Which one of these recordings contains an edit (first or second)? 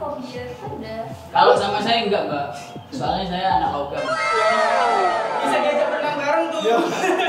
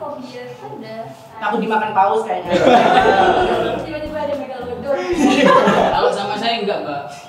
first